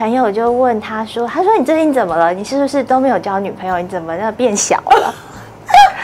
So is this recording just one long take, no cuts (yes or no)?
yes